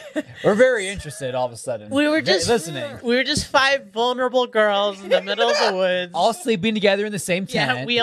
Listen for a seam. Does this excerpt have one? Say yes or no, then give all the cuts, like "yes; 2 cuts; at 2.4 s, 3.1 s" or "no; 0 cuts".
no; 0 cuts